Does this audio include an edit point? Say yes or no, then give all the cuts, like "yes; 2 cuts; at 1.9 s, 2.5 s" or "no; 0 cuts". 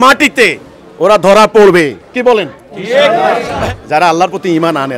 no; 0 cuts